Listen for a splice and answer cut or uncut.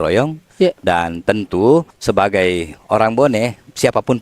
cut